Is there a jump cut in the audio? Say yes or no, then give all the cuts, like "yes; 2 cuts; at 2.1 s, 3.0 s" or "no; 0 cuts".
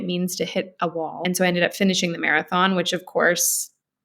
yes; 1 cut; at 1.2 s